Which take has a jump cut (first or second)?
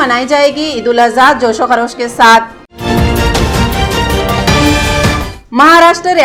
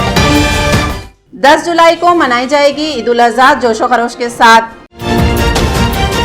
second